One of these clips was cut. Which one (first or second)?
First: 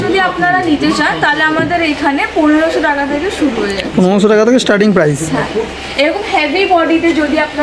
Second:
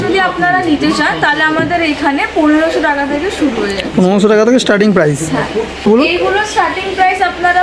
second